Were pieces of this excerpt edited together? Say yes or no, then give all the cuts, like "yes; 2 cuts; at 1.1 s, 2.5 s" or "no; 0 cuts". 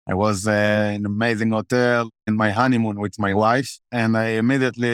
yes; 2 cuts; at 2.2 s, 3.8 s